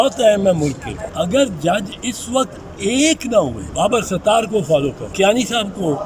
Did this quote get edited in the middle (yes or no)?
yes